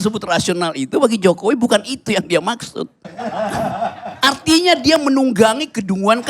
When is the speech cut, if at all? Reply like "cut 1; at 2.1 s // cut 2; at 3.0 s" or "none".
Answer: cut 1; at 3.0 s